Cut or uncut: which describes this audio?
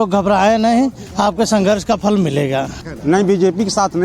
cut